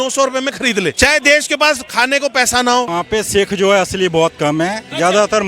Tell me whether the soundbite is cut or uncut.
cut